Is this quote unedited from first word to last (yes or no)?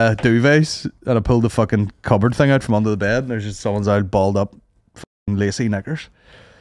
yes